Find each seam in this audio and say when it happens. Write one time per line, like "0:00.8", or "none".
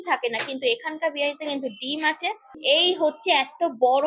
0:02.5